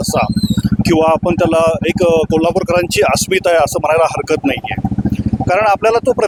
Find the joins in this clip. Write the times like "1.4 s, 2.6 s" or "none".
none

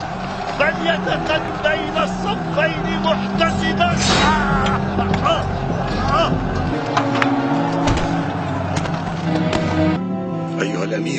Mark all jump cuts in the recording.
1.5 s

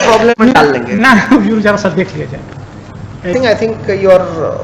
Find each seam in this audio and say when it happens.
3.3 s

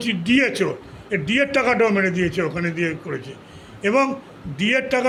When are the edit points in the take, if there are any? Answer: none

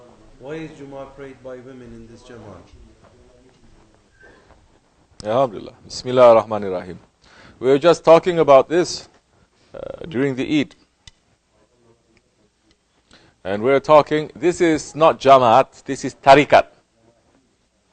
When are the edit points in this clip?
6.0 s

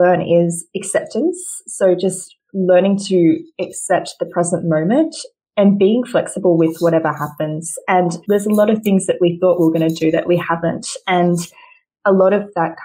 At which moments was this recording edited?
8.2 s

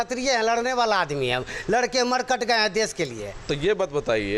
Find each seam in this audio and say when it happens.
none

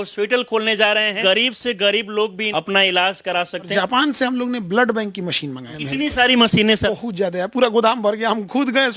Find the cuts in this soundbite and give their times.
1.2 s, 2.4 s, 3.7 s, 5.7 s, 6.9 s

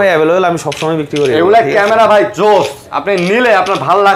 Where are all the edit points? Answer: none

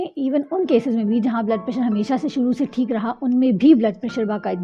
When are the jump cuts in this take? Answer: none

